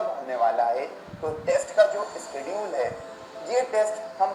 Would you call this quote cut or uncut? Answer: uncut